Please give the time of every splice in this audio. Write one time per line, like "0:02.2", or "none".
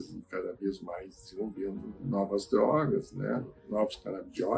0:01.9
0:03.5